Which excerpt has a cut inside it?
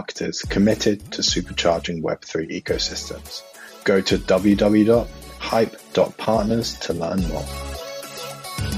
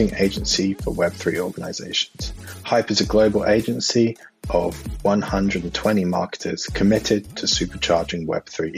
first; 1 cut; at 7.4 s

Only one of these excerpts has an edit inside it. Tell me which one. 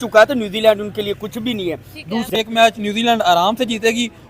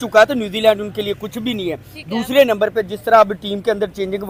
first; 1 cut; at 2.3 s

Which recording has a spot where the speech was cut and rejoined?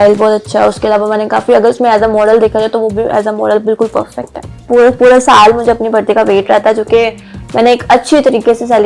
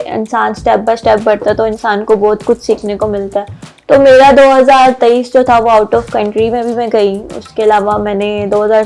first; 1 cut; at 4.6 s

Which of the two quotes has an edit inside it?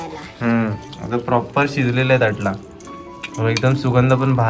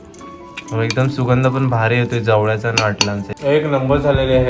second; 1 cut; at 3.3 s

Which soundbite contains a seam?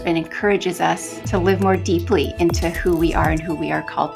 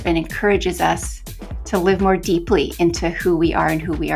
first; 1 cut; at 1.1 s

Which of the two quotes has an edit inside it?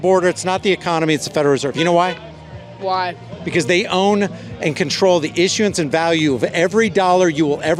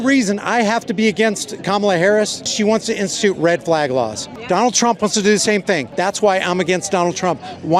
second; 3 cuts; at 2.4 s, 4.3 s, 5.9 s

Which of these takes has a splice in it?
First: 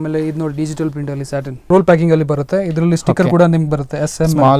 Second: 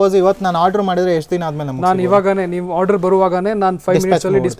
first; 1 cut; at 1.7 s

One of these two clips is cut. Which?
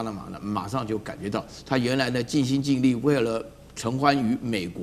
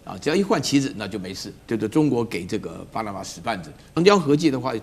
second; 2 cuts; at 1.5 s, 3.9 s

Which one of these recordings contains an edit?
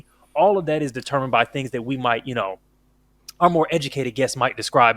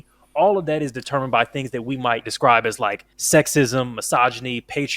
second; 2 cuts; at 2.3 s, 3.1 s

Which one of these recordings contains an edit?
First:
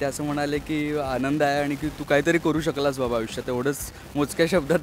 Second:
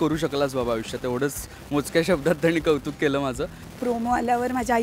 second; 1 cut; at 3.6 s

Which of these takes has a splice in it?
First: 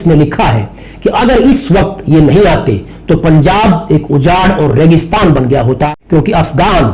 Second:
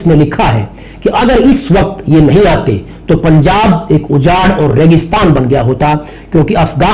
first; 1 cut; at 6.0 s

